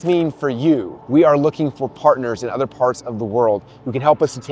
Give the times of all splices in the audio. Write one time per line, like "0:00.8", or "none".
0:01.0